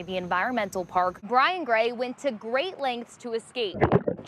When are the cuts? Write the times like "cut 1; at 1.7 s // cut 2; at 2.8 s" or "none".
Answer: cut 1; at 1.2 s